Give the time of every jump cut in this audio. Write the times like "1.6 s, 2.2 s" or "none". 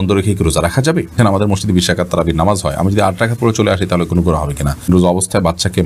1.2 s, 4.9 s